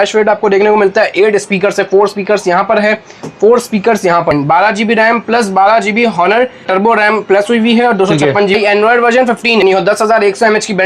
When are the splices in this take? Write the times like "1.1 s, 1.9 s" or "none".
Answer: 4.3 s, 6.6 s, 8.6 s, 9.6 s